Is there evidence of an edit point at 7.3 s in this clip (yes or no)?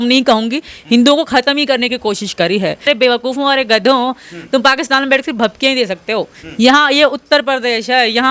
no